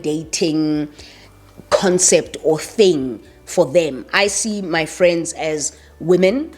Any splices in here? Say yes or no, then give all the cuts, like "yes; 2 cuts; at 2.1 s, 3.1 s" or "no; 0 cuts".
no; 0 cuts